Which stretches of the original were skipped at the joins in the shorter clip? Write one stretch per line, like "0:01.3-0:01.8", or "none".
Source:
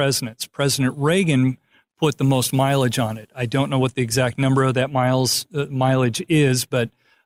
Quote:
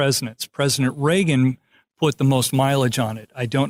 none